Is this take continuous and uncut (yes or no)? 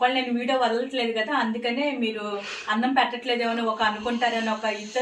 yes